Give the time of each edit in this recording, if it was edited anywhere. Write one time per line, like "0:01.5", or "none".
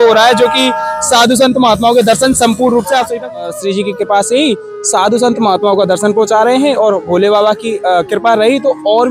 0:03.4